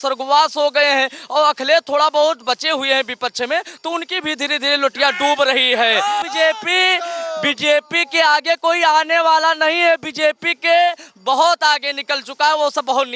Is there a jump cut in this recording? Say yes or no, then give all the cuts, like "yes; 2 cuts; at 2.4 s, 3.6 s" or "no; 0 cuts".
yes; 1 cut; at 6.2 s